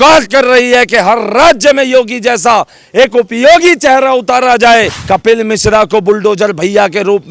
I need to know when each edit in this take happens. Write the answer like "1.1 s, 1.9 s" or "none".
5.0 s